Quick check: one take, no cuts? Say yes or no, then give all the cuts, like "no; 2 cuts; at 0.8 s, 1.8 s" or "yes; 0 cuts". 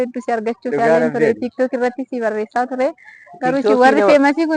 yes; 0 cuts